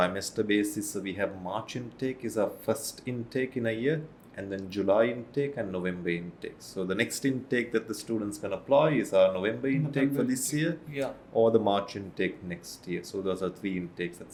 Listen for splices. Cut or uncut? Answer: uncut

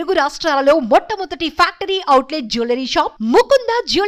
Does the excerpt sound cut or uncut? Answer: uncut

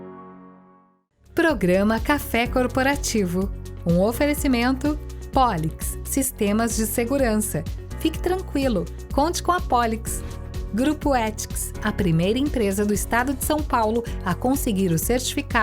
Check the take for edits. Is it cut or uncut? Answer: cut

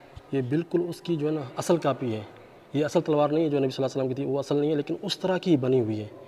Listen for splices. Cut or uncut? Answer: uncut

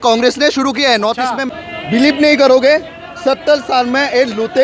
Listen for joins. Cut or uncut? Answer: cut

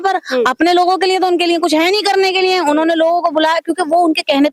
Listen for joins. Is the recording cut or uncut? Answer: uncut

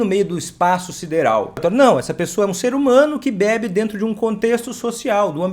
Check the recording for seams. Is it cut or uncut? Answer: cut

